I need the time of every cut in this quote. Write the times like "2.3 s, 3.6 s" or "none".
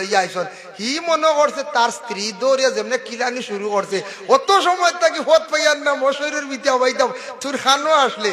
none